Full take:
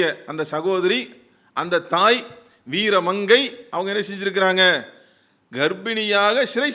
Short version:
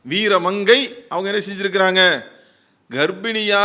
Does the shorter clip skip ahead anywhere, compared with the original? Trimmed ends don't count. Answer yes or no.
no